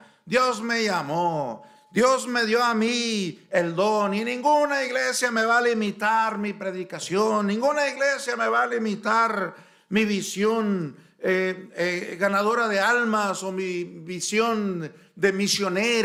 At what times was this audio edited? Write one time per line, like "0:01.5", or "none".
none